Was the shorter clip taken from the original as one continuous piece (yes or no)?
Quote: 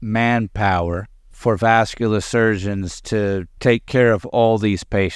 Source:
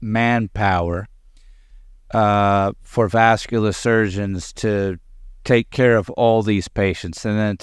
no